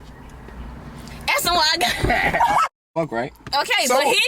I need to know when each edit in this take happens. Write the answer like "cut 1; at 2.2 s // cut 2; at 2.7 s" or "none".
cut 1; at 2.7 s

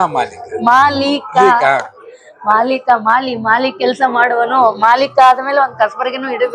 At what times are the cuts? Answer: none

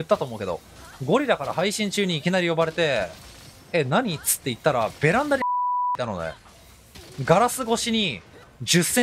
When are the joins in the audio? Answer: none

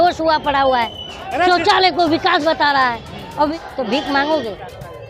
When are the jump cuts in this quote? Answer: cut 1; at 3.5 s

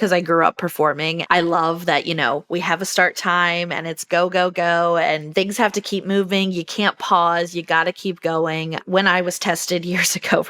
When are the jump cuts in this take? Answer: cut 1; at 1.1 s // cut 2; at 5.2 s

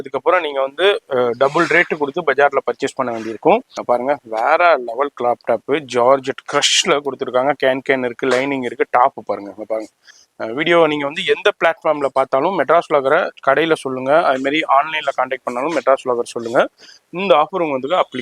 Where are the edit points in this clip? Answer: cut 1; at 3.7 s // cut 2; at 10.1 s

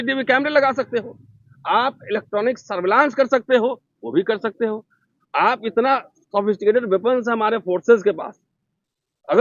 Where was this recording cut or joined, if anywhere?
none

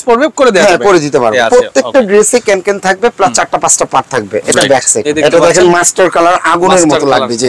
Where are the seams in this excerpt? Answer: cut 1; at 1.4 s // cut 2; at 5.0 s

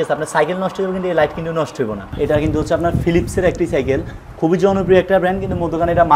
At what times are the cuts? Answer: cut 1; at 2.1 s

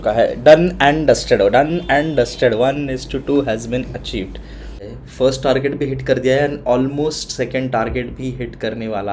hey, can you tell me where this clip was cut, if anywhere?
cut 1; at 4.9 s

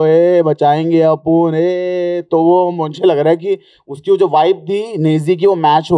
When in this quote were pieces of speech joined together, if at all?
none

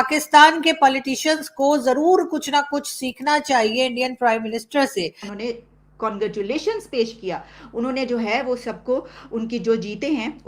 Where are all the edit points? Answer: cut 1; at 5.3 s

